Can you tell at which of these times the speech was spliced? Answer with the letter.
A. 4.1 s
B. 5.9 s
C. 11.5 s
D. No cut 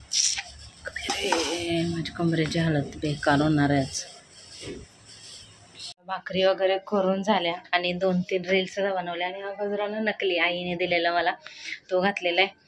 B